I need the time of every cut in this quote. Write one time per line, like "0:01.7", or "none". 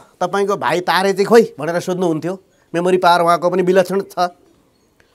none